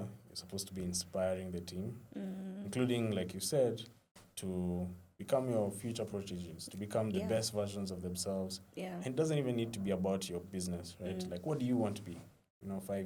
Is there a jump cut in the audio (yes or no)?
no